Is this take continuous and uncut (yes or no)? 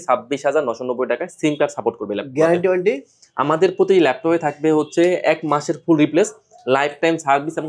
yes